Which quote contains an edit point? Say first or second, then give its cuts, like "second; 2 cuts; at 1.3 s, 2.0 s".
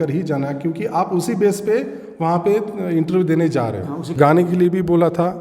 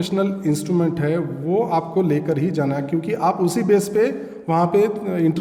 first; 1 cut; at 4.1 s